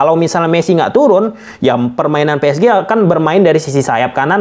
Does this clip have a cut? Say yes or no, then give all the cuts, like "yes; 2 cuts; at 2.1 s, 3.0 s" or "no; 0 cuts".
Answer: no; 0 cuts